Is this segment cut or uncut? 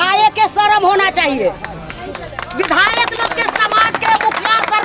uncut